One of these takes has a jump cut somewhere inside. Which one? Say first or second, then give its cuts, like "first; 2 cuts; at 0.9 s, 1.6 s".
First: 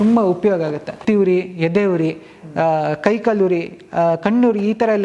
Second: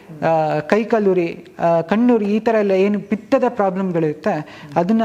first; 1 cut; at 1.0 s